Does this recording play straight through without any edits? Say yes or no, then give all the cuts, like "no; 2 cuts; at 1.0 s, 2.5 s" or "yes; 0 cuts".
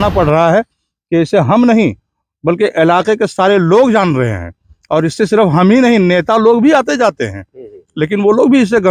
yes; 0 cuts